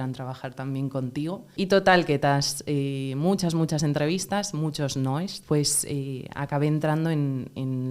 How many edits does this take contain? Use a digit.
2